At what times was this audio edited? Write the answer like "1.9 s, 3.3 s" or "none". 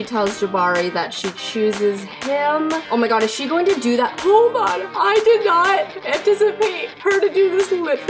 4.2 s, 4.9 s